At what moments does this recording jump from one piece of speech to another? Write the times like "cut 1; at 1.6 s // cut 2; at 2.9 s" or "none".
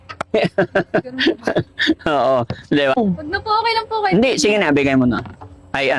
cut 1; at 3.0 s